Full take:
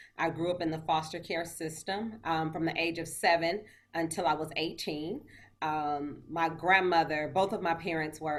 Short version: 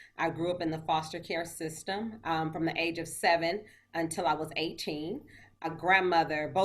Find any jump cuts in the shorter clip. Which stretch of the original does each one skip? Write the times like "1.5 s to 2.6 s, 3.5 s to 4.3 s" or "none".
5.6 s to 6.4 s